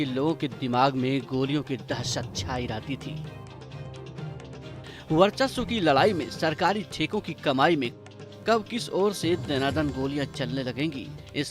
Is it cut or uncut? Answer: uncut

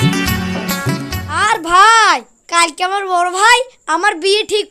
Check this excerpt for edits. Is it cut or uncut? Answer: cut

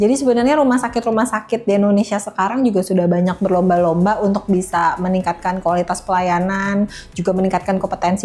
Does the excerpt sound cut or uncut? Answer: uncut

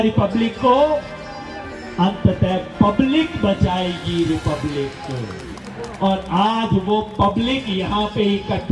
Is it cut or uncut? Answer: uncut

